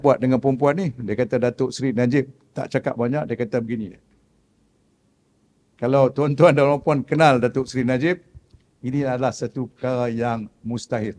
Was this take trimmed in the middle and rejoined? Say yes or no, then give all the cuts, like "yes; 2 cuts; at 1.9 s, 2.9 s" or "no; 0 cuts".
no; 0 cuts